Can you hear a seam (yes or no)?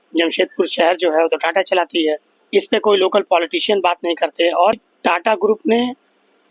yes